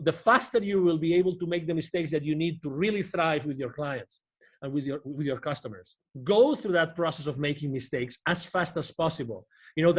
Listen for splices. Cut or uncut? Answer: cut